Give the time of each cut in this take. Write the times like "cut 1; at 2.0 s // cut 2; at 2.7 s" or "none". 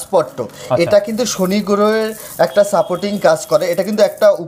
none